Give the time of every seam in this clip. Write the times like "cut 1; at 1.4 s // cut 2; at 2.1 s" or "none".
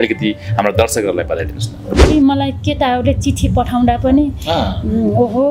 cut 1; at 2.1 s